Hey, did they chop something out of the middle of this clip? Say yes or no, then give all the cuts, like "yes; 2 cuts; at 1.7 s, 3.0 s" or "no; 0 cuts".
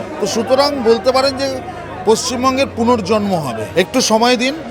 yes; 1 cut; at 3.6 s